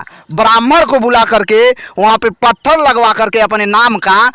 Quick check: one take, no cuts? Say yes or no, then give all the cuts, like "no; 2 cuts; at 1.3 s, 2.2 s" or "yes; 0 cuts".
yes; 0 cuts